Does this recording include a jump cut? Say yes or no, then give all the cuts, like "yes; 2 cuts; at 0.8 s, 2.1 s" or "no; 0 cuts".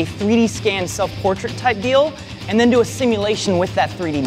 no; 0 cuts